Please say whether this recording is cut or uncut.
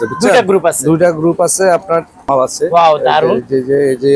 cut